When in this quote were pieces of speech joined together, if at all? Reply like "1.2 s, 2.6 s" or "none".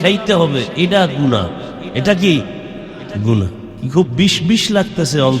1.8 s, 3.7 s